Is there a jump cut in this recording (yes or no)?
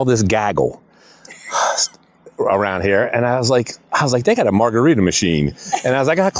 no